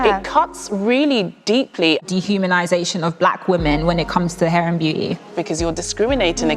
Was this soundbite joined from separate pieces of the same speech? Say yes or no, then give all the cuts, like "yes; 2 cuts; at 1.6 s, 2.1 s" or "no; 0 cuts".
yes; 2 cuts; at 2.0 s, 5.4 s